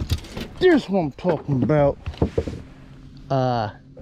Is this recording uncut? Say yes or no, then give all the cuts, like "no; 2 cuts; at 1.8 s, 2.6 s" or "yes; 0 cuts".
no; 1 cut; at 2.1 s